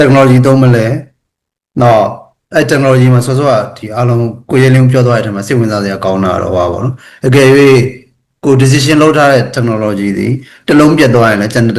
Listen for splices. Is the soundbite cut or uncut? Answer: uncut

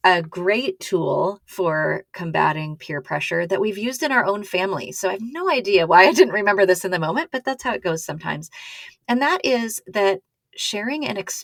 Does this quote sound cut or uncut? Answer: uncut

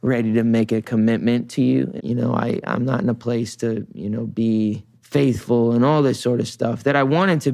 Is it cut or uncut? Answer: cut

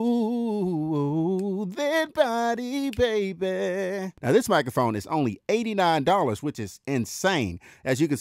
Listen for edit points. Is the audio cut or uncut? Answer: cut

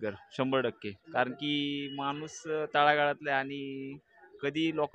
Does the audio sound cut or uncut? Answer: uncut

